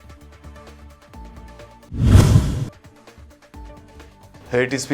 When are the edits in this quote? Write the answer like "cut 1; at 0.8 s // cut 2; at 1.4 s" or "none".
none